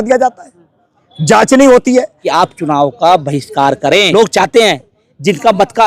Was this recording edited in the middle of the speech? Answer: yes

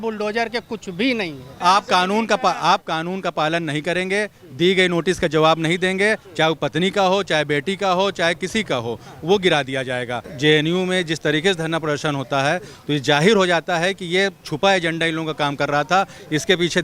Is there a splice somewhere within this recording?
yes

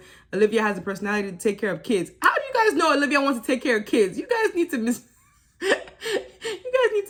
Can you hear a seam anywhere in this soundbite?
no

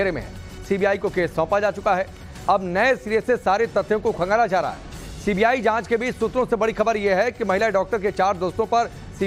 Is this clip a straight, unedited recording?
yes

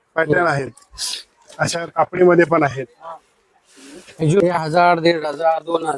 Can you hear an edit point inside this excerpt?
yes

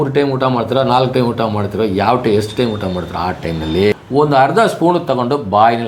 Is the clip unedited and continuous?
no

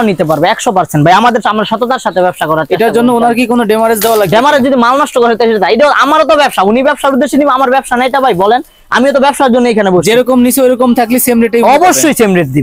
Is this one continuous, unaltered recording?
yes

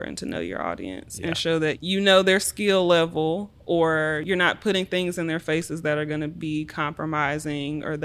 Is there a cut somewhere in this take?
yes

